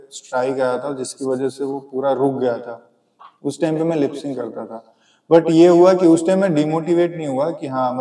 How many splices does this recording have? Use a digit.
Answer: 0